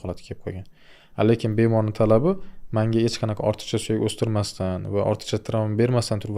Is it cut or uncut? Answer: uncut